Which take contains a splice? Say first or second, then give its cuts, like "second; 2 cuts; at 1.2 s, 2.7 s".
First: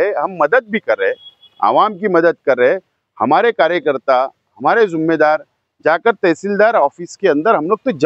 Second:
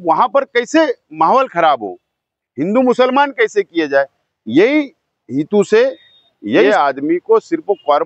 second; 1 cut; at 6.6 s